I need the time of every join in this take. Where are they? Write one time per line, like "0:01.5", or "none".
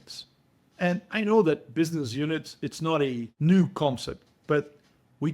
0:03.3